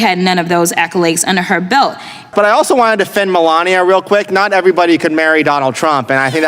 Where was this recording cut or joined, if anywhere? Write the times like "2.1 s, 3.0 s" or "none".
2.3 s